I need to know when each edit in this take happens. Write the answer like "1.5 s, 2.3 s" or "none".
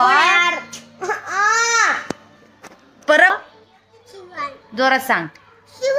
3.3 s